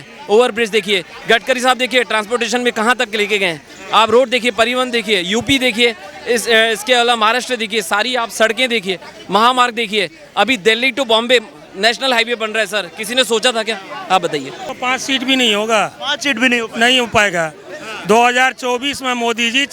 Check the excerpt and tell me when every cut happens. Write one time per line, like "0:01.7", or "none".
0:14.7